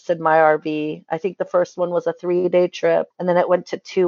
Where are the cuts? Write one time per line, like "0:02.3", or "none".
0:03.1